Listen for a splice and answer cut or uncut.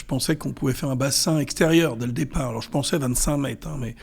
uncut